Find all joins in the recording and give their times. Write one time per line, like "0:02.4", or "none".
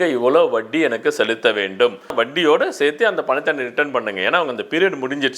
0:02.1

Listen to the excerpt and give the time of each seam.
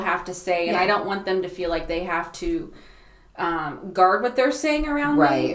none

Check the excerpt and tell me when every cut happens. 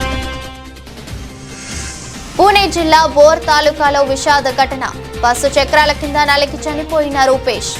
0:01.7

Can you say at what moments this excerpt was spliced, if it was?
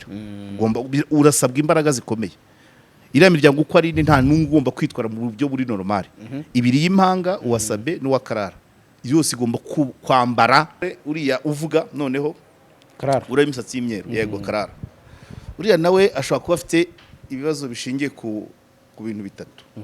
0:11.0

